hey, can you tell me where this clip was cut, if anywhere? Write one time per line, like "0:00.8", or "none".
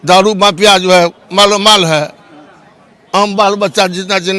none